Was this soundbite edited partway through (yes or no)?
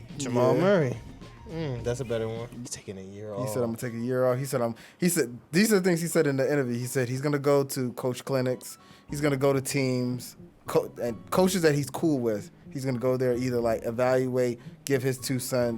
yes